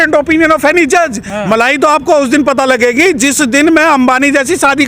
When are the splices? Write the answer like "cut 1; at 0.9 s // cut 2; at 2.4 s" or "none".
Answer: cut 1; at 1.3 s